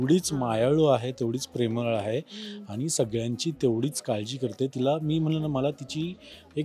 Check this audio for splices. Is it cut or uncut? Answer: uncut